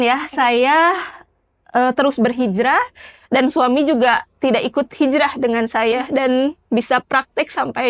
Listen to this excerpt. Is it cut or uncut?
uncut